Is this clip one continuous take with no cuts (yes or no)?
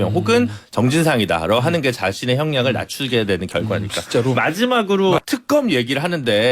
no